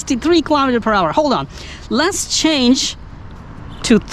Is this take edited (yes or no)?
no